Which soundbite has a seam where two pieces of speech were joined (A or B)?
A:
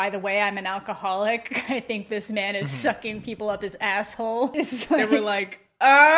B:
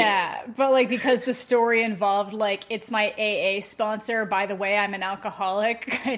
A